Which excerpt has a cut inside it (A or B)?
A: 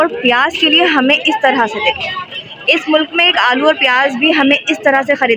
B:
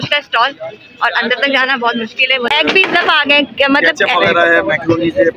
B